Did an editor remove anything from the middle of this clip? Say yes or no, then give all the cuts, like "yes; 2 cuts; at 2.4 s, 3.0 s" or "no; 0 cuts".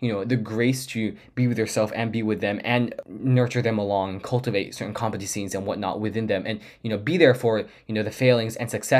yes; 1 cut; at 3.0 s